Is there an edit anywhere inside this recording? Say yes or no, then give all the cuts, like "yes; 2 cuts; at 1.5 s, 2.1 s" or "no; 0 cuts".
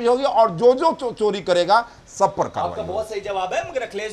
no; 0 cuts